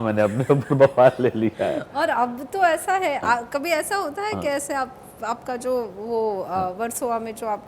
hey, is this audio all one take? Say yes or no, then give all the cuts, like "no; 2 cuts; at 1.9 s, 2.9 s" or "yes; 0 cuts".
yes; 0 cuts